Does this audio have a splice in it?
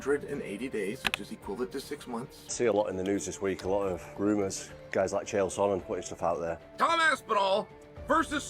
yes; 2 cuts; at 1.1 s, 2.4 s

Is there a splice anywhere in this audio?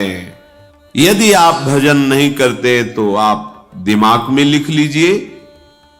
yes; 1 cut; at 1.0 s

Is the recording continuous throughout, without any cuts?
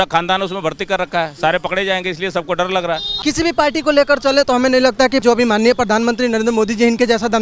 no; 2 cuts; at 3.2 s, 5.2 s

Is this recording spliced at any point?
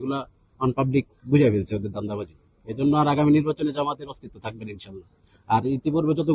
no; 0 cuts

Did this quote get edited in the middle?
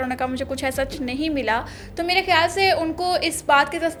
no; 0 cuts

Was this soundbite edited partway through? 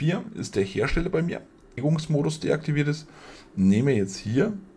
yes; 1 cut; at 1.8 s

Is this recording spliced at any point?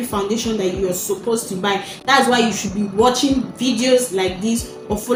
no; 0 cuts

